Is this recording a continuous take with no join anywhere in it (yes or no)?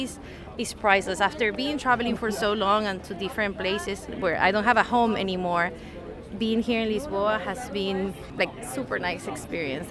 no